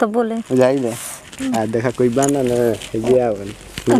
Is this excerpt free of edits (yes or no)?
yes